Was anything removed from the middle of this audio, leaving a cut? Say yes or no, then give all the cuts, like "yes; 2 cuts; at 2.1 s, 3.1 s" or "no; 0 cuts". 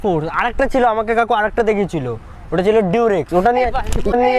no; 0 cuts